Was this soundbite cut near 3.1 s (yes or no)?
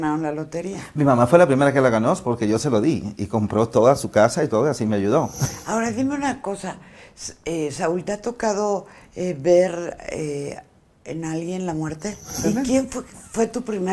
no